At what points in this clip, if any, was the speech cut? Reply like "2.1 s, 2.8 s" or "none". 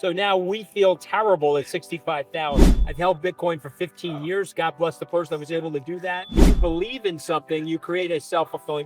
2.8 s, 6.5 s